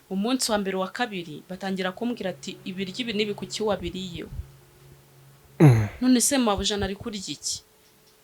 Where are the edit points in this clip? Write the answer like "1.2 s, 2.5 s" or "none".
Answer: none